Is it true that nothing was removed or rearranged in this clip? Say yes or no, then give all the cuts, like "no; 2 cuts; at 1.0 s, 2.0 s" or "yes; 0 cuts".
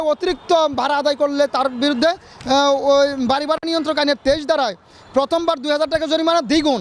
yes; 0 cuts